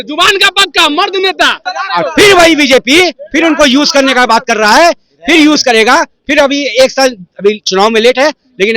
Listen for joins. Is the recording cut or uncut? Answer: cut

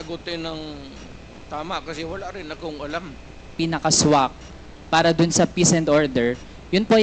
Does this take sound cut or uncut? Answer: cut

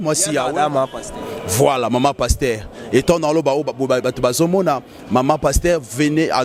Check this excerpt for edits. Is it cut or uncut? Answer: uncut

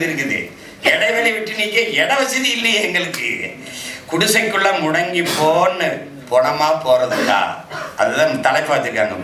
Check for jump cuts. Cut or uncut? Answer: uncut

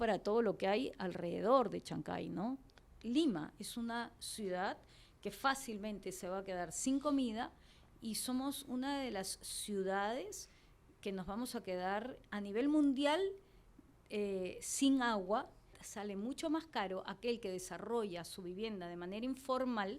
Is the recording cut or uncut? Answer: cut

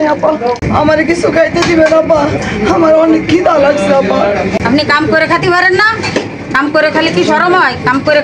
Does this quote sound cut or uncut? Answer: uncut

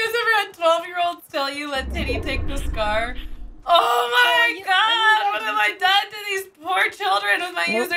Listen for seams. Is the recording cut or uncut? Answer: uncut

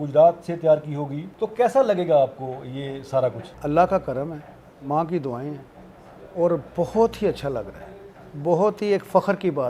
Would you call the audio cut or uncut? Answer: uncut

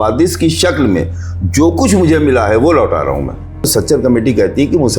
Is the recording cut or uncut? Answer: cut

